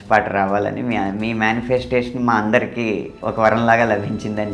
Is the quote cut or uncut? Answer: cut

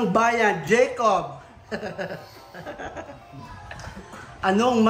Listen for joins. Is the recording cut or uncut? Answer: uncut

